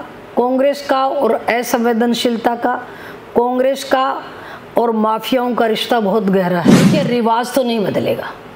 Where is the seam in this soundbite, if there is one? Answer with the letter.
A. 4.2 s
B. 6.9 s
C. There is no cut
B